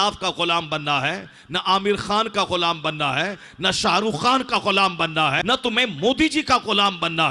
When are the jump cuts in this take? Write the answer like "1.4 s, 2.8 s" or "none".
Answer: 5.4 s